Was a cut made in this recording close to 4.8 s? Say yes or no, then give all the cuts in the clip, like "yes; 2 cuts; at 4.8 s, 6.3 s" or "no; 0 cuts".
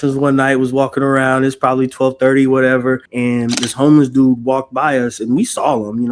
no; 1 cut; at 3.1 s